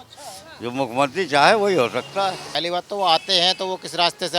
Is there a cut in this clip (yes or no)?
yes